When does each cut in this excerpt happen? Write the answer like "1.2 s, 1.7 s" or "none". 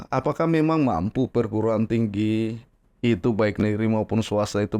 none